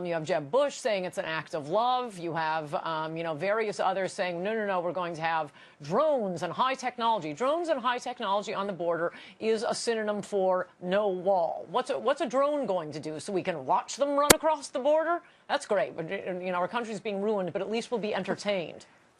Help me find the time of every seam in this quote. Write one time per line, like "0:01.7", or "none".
0:09.8